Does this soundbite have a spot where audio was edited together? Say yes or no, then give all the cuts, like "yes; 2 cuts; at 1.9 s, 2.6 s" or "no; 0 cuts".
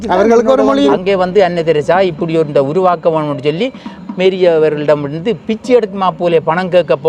yes; 1 cut; at 1.0 s